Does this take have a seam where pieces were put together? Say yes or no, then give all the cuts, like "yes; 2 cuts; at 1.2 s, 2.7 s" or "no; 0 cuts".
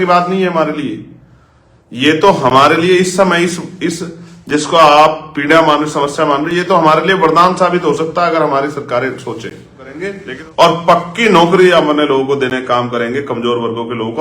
yes; 1 cut; at 10.1 s